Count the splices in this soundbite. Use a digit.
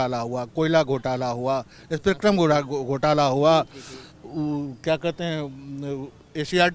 0